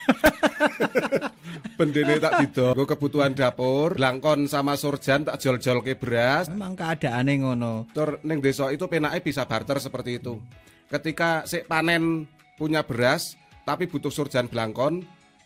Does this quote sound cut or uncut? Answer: uncut